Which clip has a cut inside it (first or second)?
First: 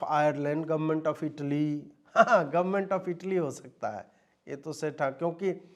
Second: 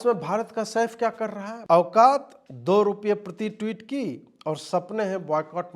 second